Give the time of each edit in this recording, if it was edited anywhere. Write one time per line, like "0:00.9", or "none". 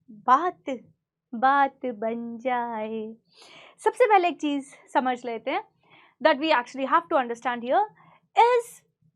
none

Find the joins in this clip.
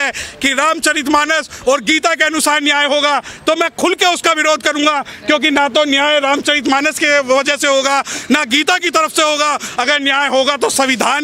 none

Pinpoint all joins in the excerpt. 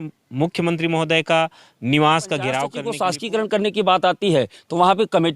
0:02.8

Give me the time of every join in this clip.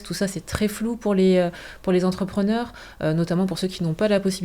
none

